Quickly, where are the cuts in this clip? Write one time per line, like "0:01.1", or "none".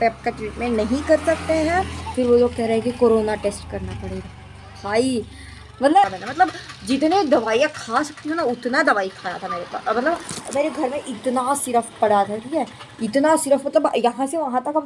0:02.0
0:06.1